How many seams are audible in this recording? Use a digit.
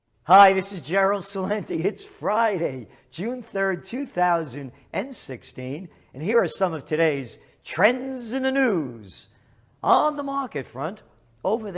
0